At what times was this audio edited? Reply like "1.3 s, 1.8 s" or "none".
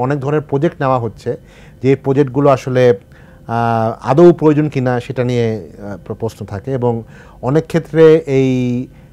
none